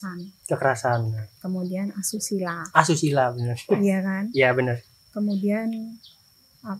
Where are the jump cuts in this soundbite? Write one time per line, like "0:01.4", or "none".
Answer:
none